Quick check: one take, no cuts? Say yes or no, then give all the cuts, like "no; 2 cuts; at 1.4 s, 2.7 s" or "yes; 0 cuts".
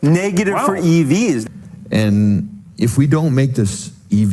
no; 1 cut; at 1.4 s